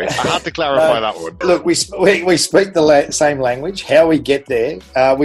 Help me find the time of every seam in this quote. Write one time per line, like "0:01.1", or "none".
0:01.4